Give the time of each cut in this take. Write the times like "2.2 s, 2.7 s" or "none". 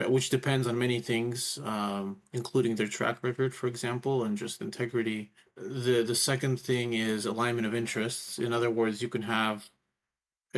none